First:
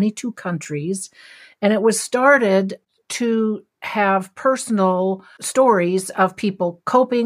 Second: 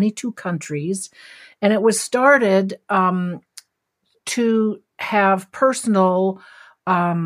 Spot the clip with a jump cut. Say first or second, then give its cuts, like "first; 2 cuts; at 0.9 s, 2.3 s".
first; 2 cuts; at 2.8 s, 5.3 s